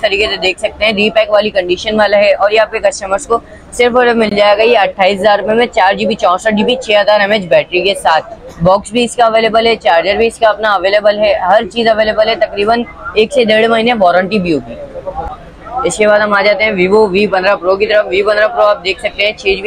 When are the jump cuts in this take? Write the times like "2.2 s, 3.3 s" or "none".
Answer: none